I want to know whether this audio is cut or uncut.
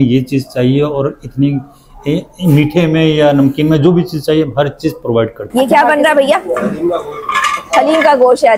cut